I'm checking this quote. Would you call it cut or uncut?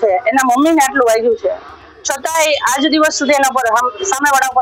uncut